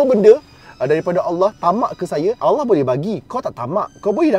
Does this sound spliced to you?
yes; 1 cut; at 2.4 s

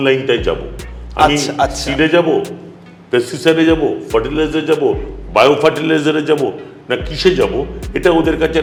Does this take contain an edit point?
no; 0 cuts

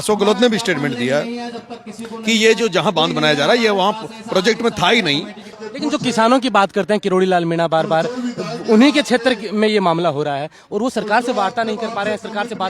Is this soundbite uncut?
no; 1 cut; at 5.4 s

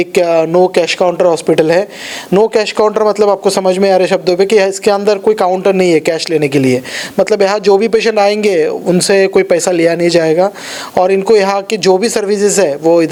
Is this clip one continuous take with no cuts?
yes; 0 cuts

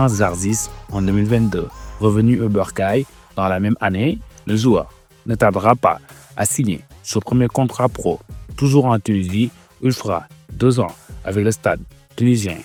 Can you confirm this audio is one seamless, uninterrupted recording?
yes; 0 cuts

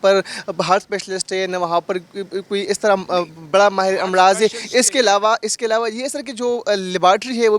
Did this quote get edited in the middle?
no; 0 cuts

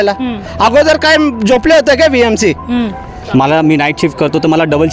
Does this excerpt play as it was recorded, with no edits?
no; 1 cut; at 3.2 s

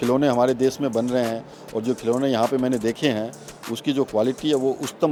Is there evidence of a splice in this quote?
no; 0 cuts

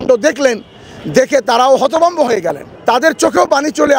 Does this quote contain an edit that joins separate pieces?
yes; 1 cut; at 2.7 s

